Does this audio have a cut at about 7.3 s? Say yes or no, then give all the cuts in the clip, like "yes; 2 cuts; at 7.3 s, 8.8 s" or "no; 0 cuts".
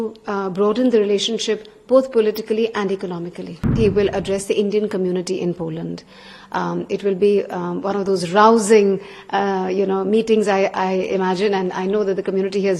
no; 1 cut; at 3.7 s